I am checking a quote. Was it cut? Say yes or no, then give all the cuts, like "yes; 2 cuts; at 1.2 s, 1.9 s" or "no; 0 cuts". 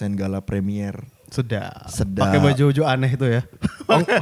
no; 0 cuts